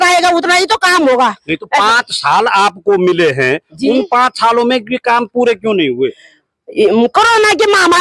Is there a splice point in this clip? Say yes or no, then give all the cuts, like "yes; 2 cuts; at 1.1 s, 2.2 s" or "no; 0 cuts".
no; 0 cuts